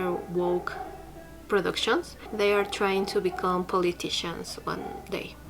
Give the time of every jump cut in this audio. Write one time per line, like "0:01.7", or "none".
0:02.2